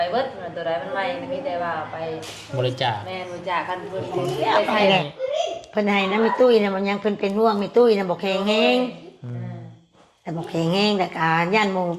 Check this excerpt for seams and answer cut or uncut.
cut